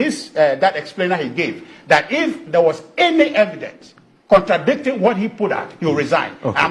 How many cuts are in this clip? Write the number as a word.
zero